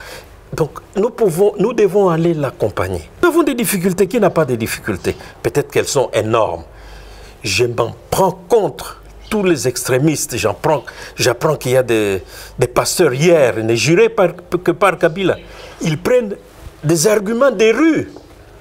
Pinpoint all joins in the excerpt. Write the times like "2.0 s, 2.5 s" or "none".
3.2 s